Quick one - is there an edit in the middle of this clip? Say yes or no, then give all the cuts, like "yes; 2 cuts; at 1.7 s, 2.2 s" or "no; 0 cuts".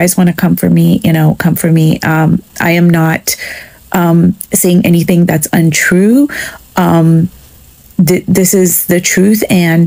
no; 0 cuts